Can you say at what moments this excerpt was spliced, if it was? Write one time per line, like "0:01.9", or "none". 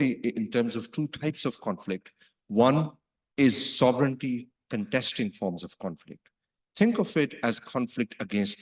none